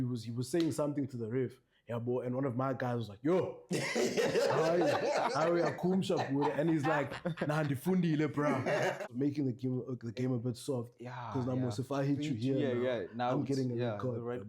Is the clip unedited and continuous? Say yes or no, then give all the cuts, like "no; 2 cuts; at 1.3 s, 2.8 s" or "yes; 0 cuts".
no; 1 cut; at 9.0 s